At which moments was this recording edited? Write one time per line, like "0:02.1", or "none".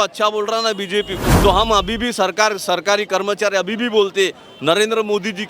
0:01.2